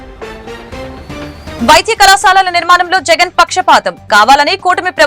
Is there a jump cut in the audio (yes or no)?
yes